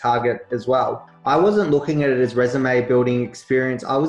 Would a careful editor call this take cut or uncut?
cut